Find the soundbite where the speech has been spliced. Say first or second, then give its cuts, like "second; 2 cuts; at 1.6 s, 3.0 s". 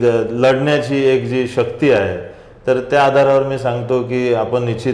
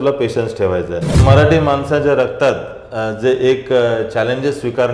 second; 1 cut; at 1.2 s